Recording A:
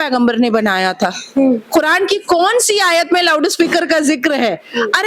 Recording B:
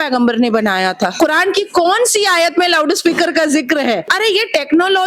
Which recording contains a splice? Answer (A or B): B